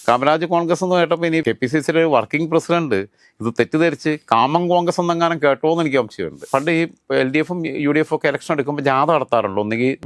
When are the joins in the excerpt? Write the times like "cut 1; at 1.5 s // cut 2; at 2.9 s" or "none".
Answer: cut 1; at 1.4 s // cut 2; at 6.4 s